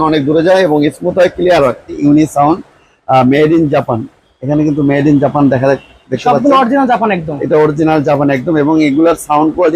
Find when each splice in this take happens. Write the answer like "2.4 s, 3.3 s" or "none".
2.0 s